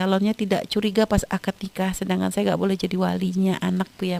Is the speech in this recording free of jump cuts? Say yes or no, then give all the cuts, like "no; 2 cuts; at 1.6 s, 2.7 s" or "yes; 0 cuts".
yes; 0 cuts